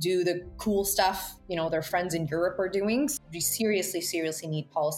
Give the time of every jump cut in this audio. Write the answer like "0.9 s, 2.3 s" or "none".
3.1 s